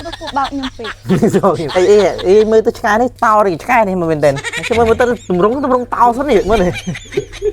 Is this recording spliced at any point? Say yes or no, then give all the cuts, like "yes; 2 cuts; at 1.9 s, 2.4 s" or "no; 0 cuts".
yes; 3 cuts; at 1.6 s, 3.1 s, 4.5 s